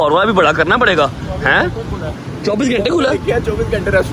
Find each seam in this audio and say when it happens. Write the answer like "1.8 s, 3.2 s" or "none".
none